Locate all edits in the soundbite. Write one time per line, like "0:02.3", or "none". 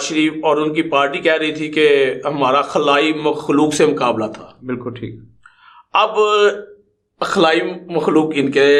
none